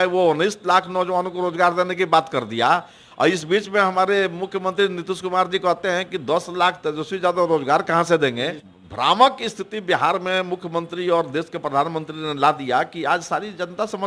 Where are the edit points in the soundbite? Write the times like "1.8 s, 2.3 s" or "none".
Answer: 8.6 s